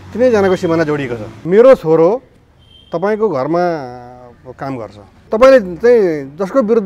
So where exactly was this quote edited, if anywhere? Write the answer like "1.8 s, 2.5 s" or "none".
1.3 s, 5.3 s